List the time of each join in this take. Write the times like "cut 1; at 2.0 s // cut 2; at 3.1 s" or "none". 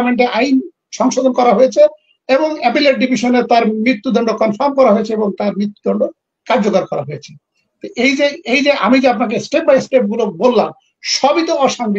none